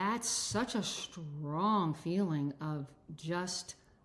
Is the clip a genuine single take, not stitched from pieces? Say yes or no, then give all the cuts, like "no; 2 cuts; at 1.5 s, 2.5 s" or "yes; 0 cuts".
yes; 0 cuts